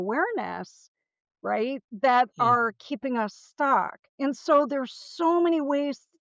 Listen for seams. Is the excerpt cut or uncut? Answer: cut